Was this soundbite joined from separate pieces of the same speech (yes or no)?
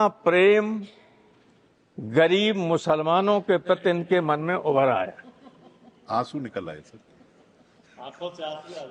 no